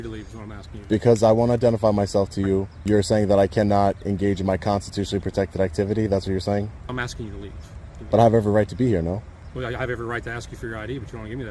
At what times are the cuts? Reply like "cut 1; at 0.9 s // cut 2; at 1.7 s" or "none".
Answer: cut 1; at 2.7 s // cut 2; at 6.9 s // cut 3; at 8.0 s // cut 4; at 9.4 s